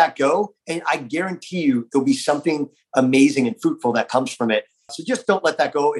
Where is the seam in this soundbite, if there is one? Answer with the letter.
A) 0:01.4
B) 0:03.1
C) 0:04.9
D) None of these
C